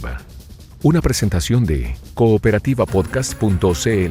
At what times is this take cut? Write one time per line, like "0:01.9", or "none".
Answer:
none